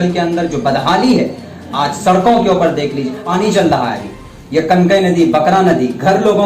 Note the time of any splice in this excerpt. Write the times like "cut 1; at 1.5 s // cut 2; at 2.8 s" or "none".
cut 1; at 3.2 s

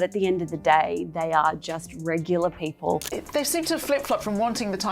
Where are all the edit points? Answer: cut 1; at 3.1 s

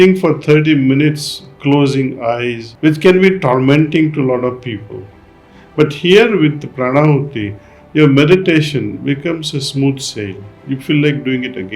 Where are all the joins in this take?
cut 1; at 2.7 s

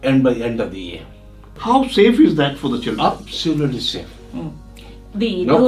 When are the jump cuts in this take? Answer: cut 1; at 1.5 s

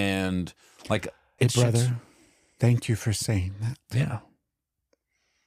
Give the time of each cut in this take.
cut 1; at 1.2 s

